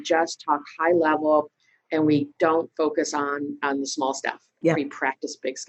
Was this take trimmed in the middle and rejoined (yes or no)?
no